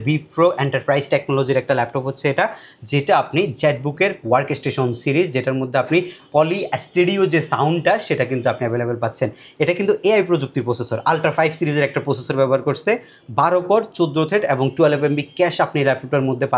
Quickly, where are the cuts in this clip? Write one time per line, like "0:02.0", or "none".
none